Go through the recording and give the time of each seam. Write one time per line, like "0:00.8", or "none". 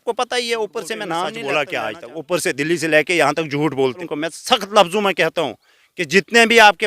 0:01.1
0:04.1